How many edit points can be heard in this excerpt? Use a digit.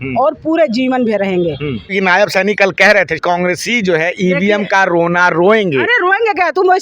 2